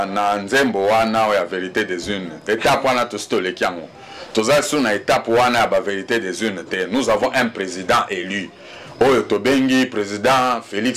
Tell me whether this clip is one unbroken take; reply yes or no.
yes